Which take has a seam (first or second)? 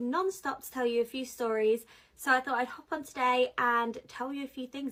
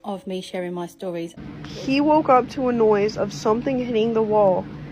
second